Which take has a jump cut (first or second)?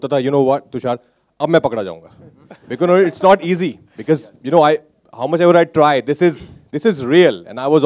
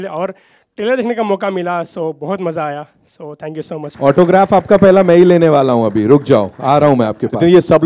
second